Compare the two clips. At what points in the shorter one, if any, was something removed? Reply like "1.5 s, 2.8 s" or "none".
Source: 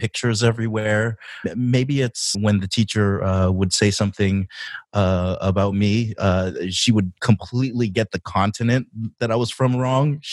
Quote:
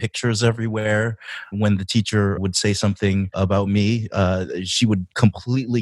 1.4 s, 2.4 s, 3.3 s